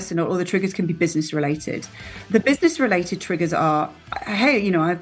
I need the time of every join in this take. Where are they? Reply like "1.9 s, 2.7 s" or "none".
none